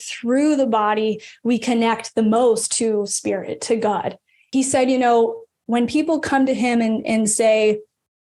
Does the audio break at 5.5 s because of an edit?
no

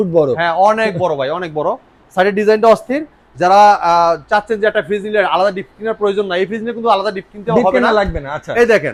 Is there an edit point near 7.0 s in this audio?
no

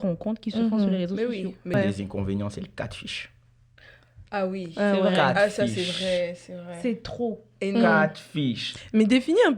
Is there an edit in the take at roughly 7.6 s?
no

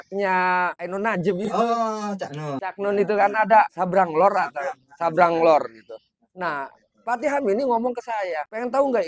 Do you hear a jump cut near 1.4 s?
yes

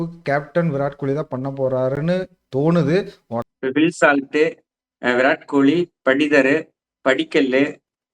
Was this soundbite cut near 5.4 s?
no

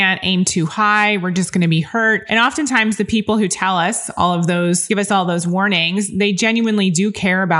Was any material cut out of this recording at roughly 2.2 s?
yes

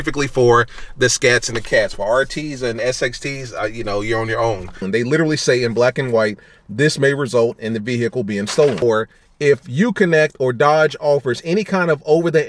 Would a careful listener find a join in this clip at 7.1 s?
no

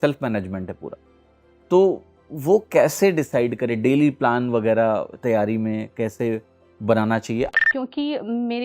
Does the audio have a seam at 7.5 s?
yes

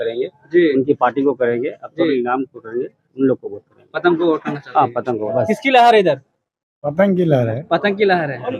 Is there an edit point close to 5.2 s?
yes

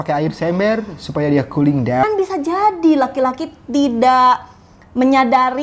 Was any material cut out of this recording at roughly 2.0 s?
yes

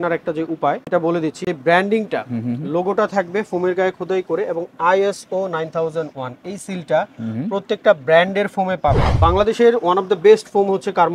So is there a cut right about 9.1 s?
yes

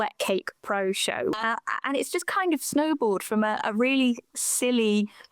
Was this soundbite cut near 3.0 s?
no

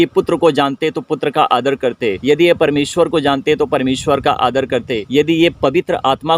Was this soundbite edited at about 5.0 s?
yes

